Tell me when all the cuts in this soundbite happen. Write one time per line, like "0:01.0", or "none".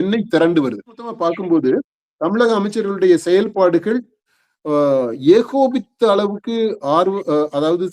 0:01.2